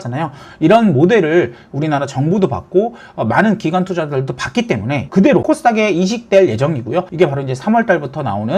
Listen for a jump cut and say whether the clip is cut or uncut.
cut